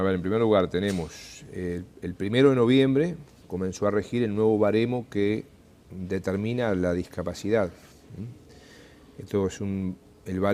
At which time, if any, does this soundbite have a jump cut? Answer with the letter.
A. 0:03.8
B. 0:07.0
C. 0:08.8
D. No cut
B